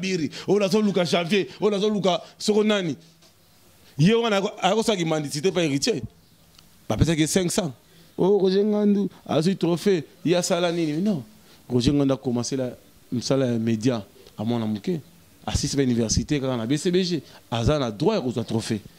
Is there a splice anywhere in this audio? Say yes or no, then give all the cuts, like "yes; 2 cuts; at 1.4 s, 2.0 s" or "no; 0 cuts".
yes; 1 cut; at 8.0 s